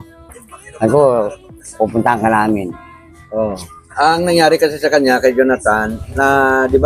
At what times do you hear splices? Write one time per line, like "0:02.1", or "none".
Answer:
0:03.8